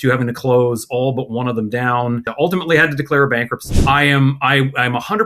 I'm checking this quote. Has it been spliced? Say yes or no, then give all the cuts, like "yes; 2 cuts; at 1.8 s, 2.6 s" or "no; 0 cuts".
yes; 2 cuts; at 2.3 s, 3.6 s